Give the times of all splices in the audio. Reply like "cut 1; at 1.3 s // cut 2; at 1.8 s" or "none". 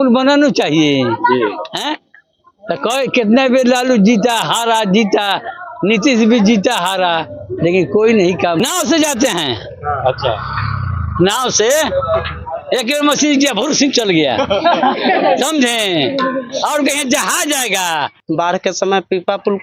cut 1; at 8.6 s // cut 2; at 18.2 s